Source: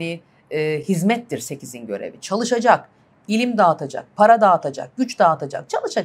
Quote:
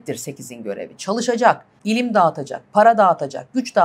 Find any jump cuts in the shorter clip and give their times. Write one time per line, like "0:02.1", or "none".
0:01.7